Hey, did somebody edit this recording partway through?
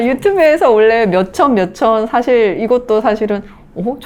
no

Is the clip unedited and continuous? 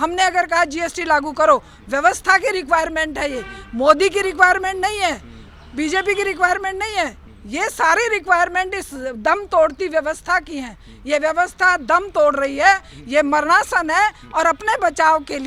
yes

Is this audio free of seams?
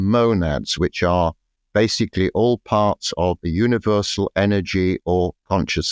yes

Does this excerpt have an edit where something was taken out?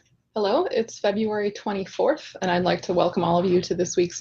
no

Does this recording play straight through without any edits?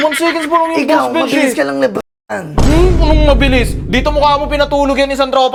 yes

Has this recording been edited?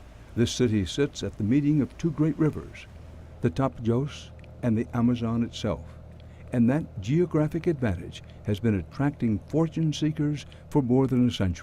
yes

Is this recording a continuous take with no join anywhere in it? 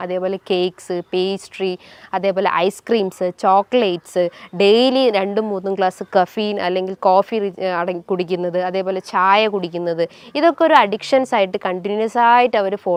yes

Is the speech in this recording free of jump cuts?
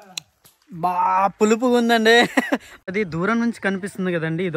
no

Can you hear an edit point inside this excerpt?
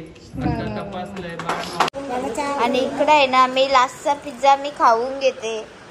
yes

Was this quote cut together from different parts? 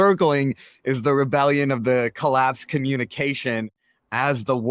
no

